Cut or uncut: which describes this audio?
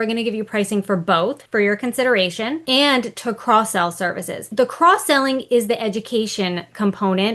cut